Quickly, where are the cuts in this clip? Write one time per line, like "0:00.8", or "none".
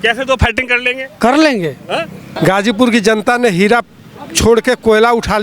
0:02.2